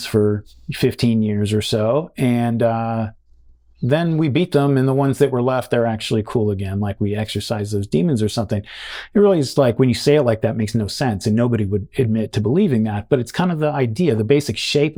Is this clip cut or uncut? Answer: uncut